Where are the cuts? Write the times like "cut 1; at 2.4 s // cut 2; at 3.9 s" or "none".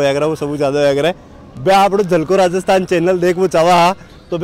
none